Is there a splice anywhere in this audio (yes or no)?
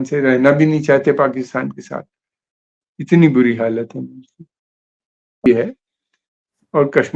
yes